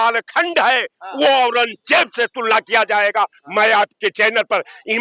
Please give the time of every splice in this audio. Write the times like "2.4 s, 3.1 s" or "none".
none

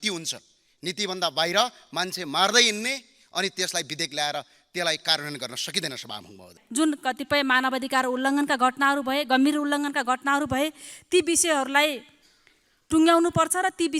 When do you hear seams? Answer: 6.6 s

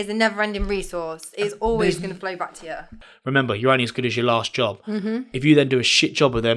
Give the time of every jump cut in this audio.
3.0 s

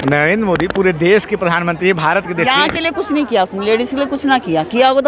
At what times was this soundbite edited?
none

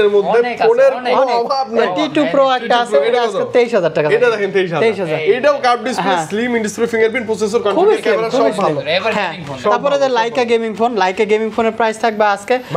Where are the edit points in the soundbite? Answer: none

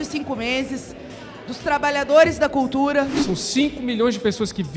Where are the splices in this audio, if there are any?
3.2 s

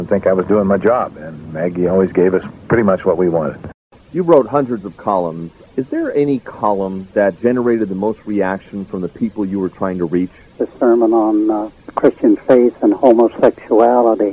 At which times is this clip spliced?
4.0 s

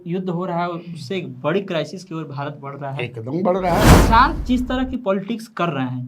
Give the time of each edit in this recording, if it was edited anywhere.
3.9 s

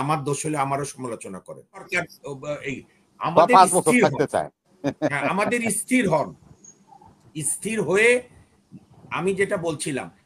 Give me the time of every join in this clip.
1.9 s

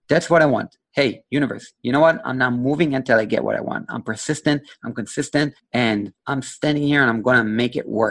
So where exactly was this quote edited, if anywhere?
5.6 s, 6.2 s

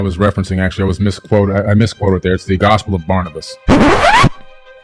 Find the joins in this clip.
none

